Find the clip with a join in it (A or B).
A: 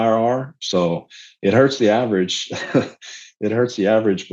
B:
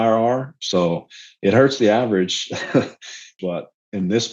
B